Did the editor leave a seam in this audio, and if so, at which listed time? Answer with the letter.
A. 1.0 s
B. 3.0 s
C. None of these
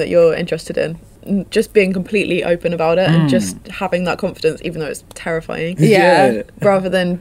A